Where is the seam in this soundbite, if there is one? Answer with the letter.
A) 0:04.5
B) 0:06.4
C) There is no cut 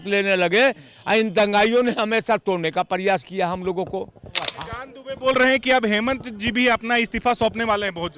A